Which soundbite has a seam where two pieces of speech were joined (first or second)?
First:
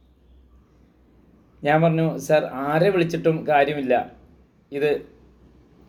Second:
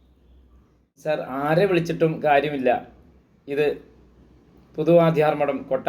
second